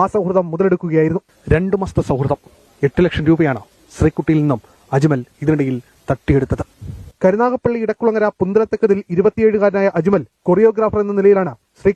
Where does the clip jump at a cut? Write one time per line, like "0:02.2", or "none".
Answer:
none

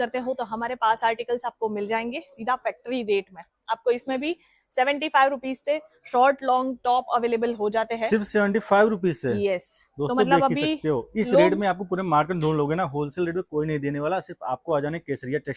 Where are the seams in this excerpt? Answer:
none

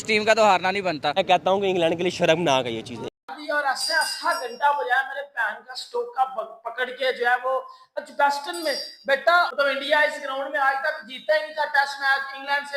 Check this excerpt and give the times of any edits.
0:03.2
0:09.5

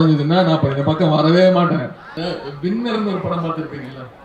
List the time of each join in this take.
0:02.0

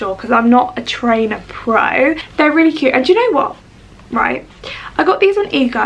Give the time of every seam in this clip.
0:02.2

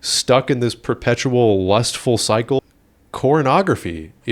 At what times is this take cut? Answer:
0:02.6

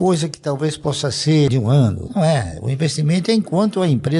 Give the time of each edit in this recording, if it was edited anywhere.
0:01.8

